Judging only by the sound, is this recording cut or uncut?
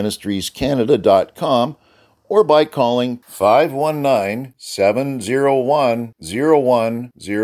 uncut